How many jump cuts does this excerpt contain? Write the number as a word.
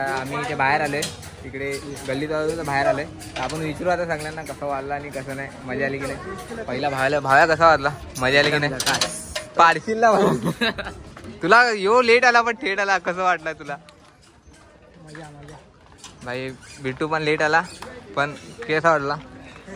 zero